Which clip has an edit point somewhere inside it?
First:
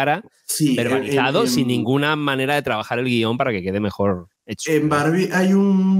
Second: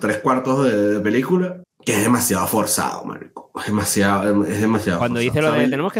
second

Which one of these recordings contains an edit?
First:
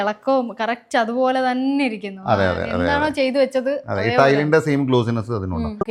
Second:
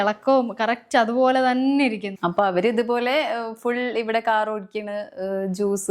second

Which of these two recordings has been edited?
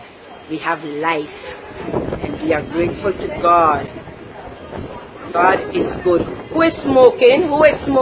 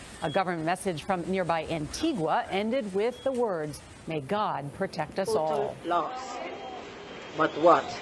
second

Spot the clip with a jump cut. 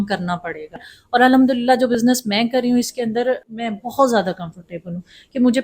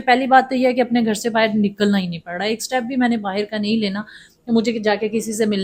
first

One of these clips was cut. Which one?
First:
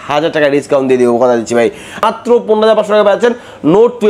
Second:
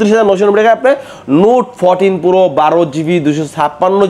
first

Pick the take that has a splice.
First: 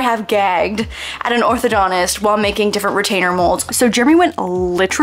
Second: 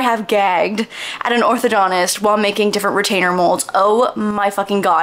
first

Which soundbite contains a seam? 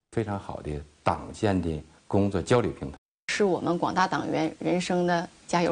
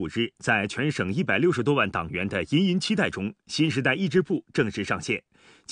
second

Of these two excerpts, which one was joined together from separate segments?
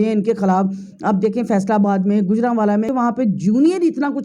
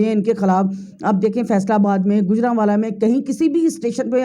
first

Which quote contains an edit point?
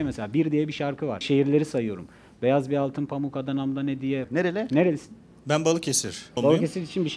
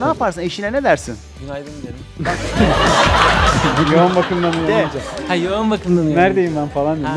first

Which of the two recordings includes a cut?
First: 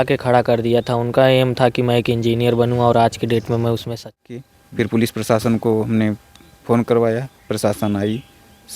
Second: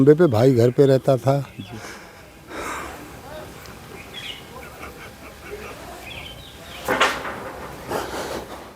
first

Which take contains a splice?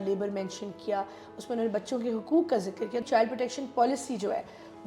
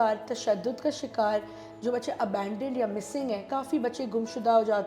first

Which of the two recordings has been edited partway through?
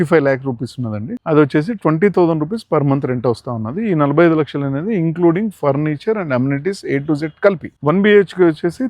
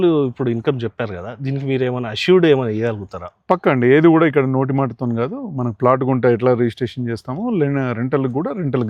first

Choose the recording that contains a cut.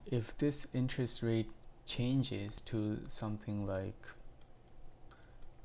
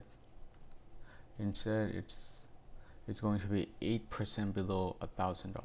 first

